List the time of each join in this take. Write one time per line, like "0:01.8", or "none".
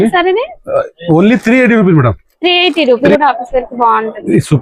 0:03.0